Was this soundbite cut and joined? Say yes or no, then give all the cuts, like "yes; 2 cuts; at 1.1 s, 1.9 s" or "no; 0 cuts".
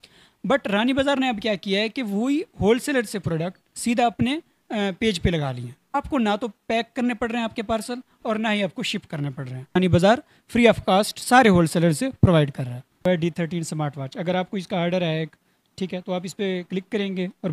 yes; 3 cuts; at 5.8 s, 9.8 s, 13.0 s